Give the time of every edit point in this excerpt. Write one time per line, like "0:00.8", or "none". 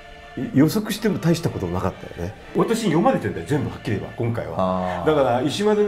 0:02.5